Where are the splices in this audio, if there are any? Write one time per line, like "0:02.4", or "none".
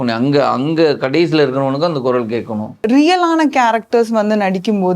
0:02.8